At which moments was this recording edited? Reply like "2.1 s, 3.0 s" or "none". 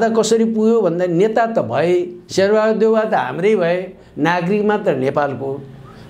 none